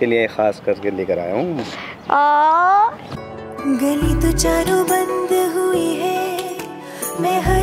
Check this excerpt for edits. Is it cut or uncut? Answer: cut